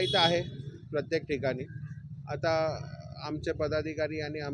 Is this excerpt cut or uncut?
uncut